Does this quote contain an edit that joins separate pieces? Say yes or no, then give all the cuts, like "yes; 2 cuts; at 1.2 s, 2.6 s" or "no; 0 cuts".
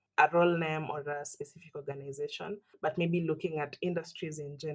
yes; 1 cut; at 2.7 s